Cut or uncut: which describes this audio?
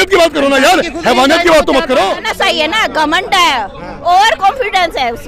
cut